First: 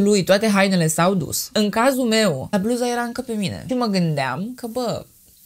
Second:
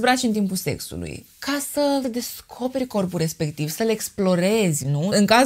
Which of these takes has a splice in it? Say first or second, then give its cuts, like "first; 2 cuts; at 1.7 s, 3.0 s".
first; 2 cuts; at 1.4 s, 2.5 s